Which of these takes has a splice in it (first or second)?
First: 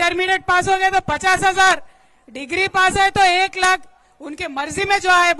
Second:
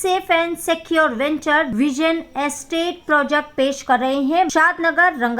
second